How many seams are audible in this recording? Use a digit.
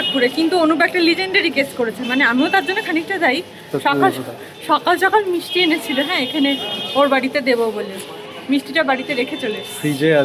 0